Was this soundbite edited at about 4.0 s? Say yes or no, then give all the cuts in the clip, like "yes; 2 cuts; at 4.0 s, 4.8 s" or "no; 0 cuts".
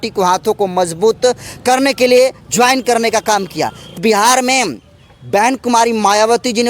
yes; 1 cut; at 4.0 s